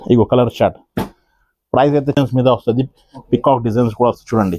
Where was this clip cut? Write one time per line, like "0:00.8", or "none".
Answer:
0:02.1